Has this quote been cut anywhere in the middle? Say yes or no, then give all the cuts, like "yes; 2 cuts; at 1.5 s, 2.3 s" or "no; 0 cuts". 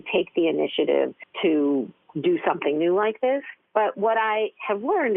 yes; 3 cuts; at 1.2 s, 2.0 s, 3.6 s